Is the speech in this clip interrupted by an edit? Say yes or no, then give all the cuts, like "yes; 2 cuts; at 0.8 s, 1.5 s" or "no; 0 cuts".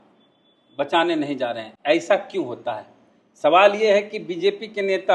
no; 0 cuts